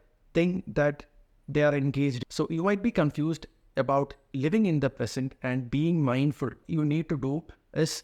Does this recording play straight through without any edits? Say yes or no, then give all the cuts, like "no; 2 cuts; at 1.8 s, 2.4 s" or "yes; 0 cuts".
no; 2 cuts; at 2.2 s, 6.6 s